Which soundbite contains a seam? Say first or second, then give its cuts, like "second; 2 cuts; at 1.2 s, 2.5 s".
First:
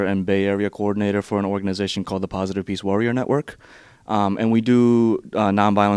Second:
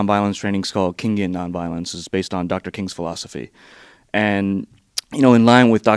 second; 1 cut; at 2.7 s